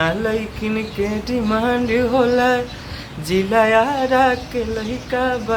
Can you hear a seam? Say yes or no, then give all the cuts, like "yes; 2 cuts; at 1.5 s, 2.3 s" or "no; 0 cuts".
no; 0 cuts